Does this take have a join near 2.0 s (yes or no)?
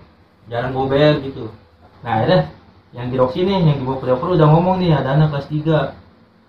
yes